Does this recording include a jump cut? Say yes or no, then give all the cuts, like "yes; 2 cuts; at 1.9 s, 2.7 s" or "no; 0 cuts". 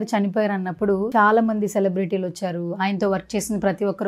yes; 1 cut; at 1.1 s